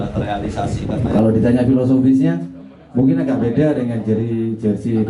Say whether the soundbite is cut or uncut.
cut